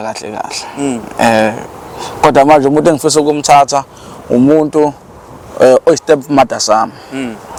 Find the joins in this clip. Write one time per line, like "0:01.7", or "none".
none